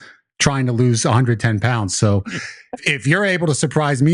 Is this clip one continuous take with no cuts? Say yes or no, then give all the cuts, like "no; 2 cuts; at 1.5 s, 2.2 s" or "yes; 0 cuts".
no; 1 cut; at 2.8 s